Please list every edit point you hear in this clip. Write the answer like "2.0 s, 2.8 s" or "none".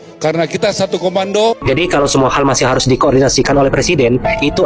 1.6 s